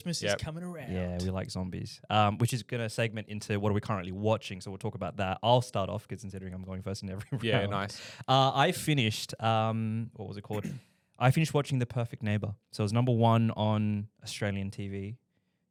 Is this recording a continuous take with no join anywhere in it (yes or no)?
yes